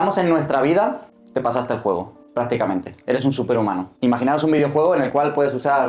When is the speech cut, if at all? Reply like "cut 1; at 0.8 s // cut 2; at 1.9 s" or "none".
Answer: cut 1; at 1.1 s // cut 2; at 2.2 s // cut 3; at 3.9 s